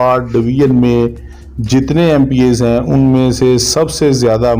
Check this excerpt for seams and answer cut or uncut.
uncut